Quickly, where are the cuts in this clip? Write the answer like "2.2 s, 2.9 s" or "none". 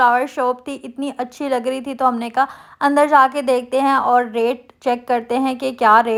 none